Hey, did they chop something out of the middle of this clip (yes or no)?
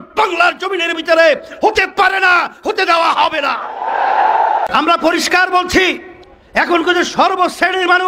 yes